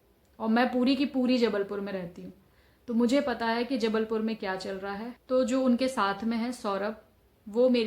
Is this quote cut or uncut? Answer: cut